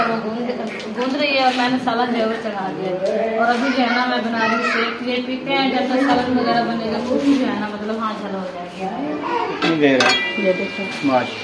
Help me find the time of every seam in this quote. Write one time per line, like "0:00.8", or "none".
0:09.6